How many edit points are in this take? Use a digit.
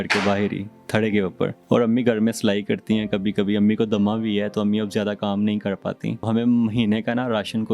2